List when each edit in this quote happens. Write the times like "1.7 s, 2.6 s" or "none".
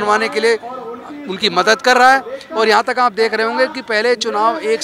none